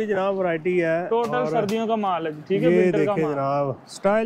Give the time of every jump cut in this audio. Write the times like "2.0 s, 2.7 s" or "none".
none